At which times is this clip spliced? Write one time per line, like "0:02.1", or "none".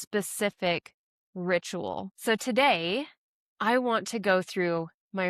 0:02.1

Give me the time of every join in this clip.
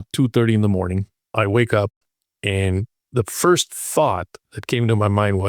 0:01.2

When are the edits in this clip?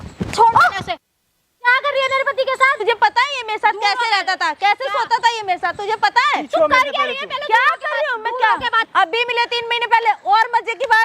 0:02.8
0:08.8

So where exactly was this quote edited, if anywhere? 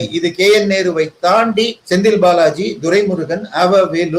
0:01.8

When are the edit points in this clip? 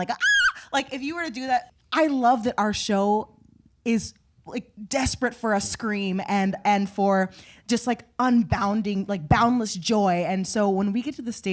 0:01.7

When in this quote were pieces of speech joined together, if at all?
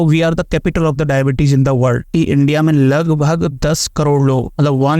0:02.1

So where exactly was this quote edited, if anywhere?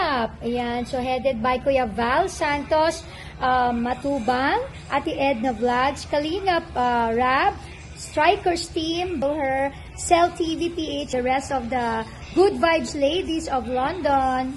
0:09.2
0:11.1

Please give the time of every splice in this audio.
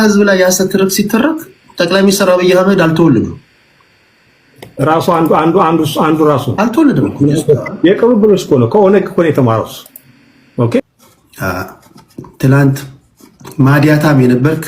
0:10.8

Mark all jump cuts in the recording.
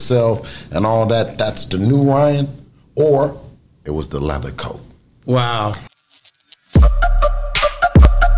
0:05.8

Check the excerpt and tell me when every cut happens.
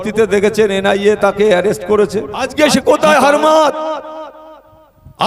0:02.4

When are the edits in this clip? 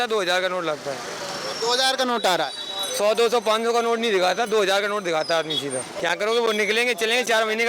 0:05.9

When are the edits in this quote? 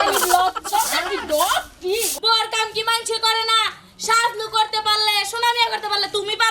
0:02.1

